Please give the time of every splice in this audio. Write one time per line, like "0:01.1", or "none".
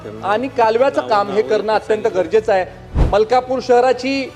0:02.8